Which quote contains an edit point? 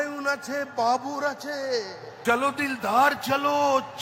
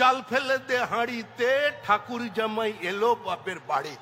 first; 1 cut; at 2.0 s

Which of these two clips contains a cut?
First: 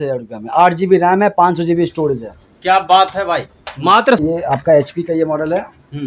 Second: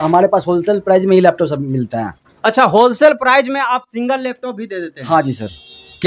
first; 1 cut; at 4.2 s

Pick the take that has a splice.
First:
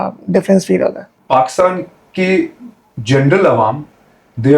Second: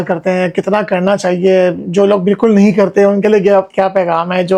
first; 1 cut; at 1.1 s

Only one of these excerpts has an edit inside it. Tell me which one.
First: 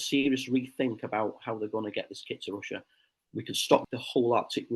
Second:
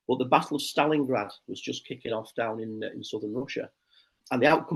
first; 1 cut; at 3.8 s

